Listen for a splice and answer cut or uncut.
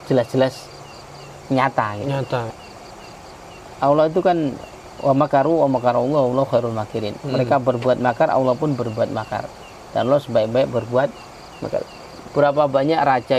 cut